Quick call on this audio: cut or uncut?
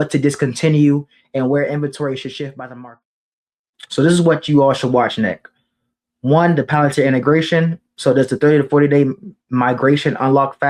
cut